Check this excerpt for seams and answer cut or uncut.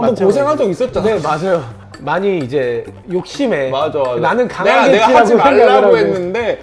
uncut